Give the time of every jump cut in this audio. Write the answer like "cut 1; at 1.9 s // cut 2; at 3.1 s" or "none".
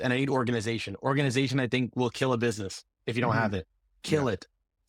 none